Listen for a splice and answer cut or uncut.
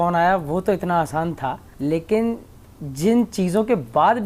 cut